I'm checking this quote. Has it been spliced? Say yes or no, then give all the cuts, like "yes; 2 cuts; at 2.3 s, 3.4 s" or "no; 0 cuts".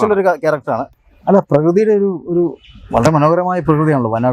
yes; 1 cut; at 1.0 s